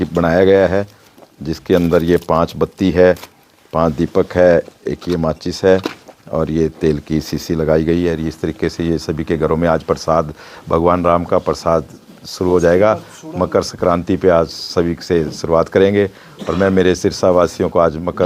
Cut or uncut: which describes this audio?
uncut